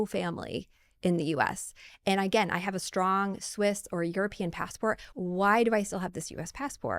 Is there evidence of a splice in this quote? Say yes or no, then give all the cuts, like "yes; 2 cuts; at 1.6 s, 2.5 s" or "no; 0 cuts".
yes; 1 cut; at 5.1 s